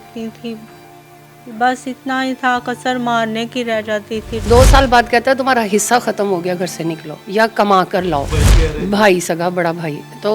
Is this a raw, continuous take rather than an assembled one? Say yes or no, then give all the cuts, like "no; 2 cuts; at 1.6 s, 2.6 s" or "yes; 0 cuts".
no; 2 cuts; at 4.5 s, 8.4 s